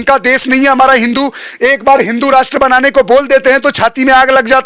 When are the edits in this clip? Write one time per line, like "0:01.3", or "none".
none